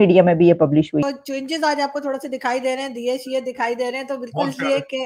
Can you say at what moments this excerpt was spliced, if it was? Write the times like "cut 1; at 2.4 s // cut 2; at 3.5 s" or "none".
cut 1; at 1.0 s